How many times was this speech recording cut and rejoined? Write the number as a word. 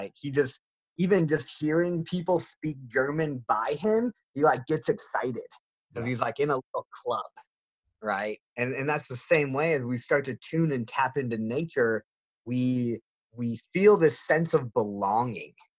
one